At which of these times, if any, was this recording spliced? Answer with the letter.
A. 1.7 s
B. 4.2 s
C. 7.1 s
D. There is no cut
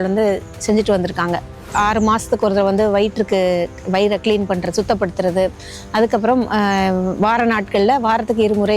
A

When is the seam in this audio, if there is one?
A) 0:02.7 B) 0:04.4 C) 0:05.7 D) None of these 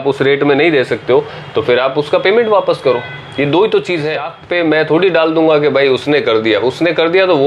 B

